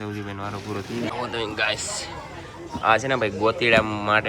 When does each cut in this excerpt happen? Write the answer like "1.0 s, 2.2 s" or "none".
1.1 s